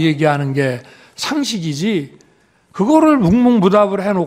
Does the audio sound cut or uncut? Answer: uncut